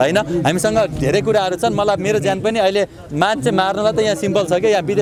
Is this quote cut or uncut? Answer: uncut